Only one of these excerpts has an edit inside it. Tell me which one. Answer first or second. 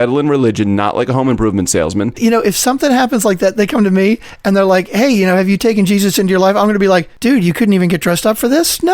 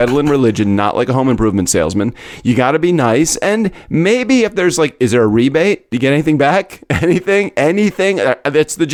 first